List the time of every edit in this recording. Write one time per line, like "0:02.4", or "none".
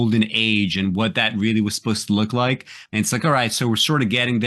0:02.7